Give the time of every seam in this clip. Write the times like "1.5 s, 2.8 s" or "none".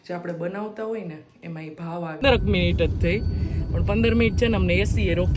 2.2 s